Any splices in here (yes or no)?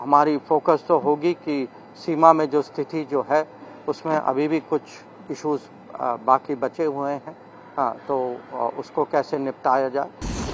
no